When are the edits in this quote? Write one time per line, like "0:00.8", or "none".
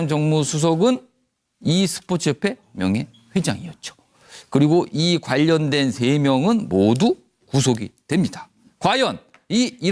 0:05.9